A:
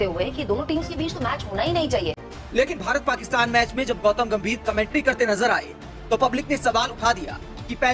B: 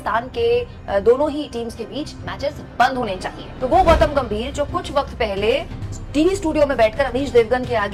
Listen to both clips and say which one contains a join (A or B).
A